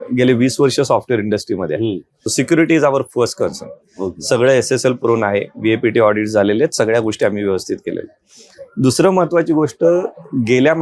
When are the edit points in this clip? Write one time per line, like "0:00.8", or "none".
0:02.2

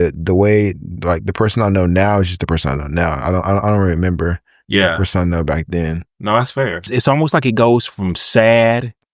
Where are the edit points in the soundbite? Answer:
0:06.9

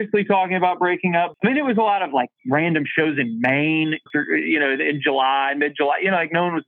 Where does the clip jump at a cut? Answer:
0:01.3
0:04.1

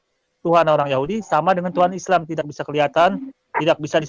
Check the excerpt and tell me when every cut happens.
none

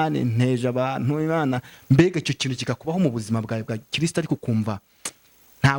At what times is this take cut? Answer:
none

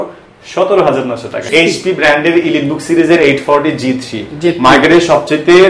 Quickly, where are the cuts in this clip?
0:01.5

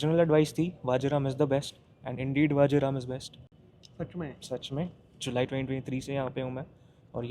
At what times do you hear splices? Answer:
none

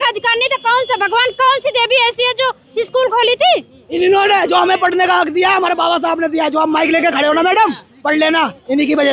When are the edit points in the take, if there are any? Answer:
0:03.9

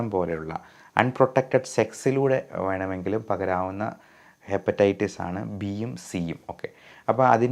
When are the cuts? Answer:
none

